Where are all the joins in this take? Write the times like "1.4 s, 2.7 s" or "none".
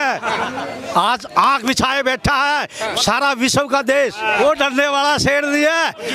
4.2 s